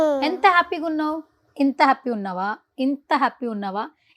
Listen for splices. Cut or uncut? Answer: uncut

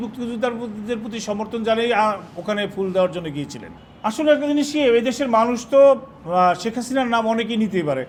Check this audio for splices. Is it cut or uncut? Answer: uncut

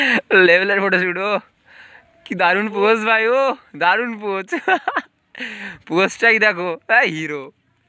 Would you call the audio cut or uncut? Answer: uncut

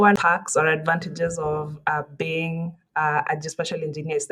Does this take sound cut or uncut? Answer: uncut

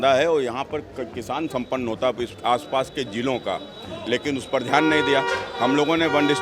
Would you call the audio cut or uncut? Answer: uncut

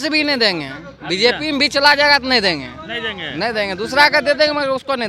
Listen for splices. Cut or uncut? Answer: uncut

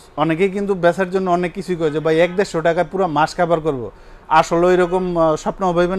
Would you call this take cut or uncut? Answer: uncut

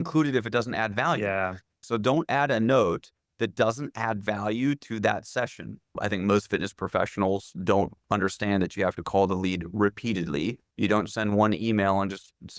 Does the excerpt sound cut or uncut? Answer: cut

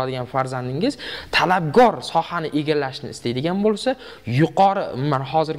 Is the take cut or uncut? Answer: uncut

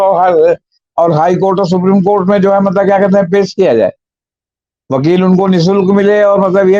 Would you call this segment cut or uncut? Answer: uncut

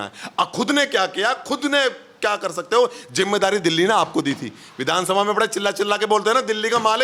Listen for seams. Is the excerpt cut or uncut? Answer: uncut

